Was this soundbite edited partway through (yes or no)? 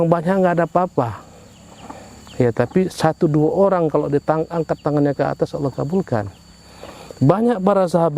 no